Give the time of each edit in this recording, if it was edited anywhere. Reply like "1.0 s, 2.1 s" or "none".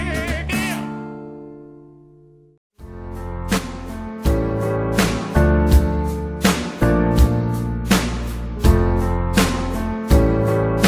none